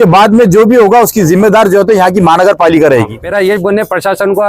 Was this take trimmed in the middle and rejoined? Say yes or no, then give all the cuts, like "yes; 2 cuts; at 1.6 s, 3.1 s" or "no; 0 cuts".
yes; 1 cut; at 3.2 s